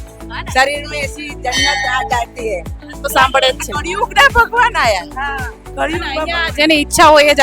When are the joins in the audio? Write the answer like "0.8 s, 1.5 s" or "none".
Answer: 3.1 s